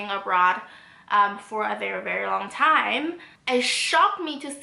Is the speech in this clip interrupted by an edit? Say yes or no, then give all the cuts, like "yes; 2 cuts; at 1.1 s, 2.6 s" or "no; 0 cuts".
yes; 1 cut; at 3.3 s